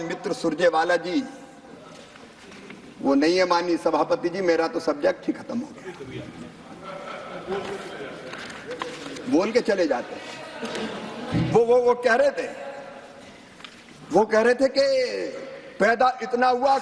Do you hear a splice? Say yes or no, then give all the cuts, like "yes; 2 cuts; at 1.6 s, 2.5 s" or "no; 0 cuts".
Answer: no; 0 cuts